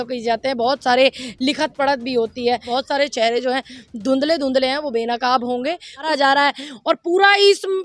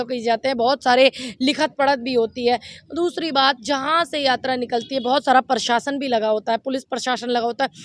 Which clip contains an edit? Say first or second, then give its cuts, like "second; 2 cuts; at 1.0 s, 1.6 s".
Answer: first; 2 cuts; at 2.6 s, 6.1 s